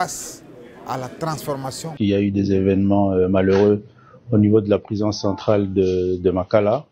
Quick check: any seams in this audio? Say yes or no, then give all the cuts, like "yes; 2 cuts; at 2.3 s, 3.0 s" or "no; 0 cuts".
yes; 1 cut; at 1.8 s